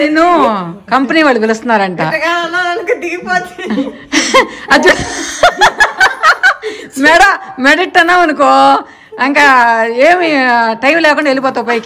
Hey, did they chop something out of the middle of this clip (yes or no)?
no